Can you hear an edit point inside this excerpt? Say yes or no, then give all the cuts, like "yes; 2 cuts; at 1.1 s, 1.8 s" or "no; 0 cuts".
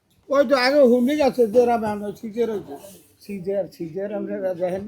yes; 1 cut; at 3.0 s